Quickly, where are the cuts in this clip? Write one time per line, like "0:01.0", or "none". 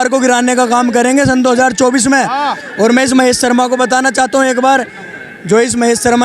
none

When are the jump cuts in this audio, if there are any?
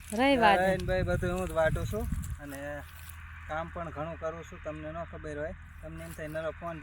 none

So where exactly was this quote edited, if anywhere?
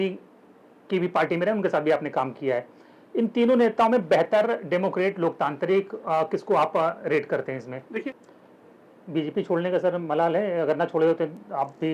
0:08.0

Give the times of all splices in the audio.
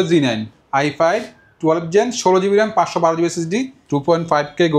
0:03.8

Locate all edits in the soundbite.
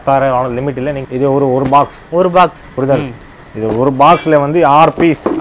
0:01.1

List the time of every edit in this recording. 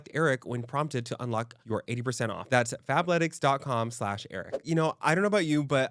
0:04.6

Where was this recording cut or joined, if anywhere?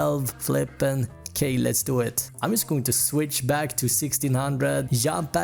none

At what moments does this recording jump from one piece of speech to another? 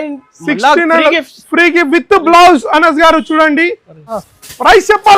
0:04.1

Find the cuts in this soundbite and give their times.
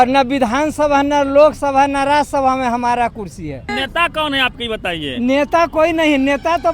0:03.7

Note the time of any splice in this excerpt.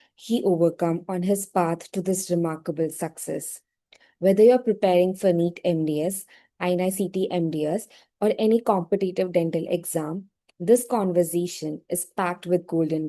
none

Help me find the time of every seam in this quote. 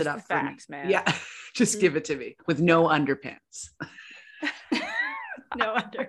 none

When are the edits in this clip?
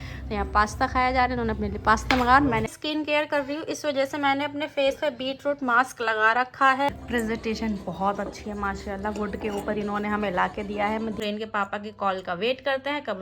0:02.7
0:06.9
0:11.2

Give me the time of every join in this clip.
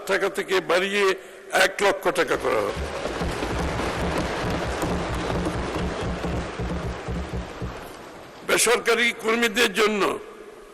none

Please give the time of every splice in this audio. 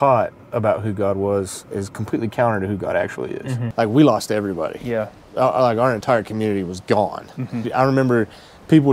0:03.6
0:07.7

